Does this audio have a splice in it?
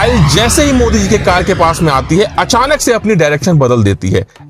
no; 0 cuts

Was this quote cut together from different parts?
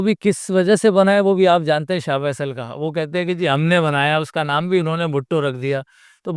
no; 0 cuts

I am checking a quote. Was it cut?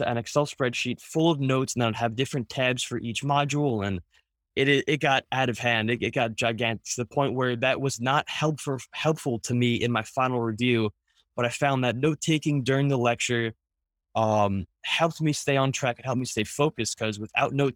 no; 0 cuts

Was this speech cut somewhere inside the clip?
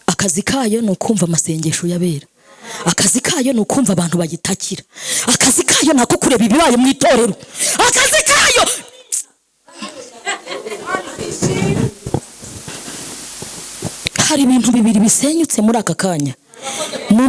no; 0 cuts

